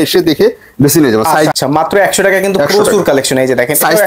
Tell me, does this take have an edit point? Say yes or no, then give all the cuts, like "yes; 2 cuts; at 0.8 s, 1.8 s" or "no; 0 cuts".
yes; 1 cut; at 1.5 s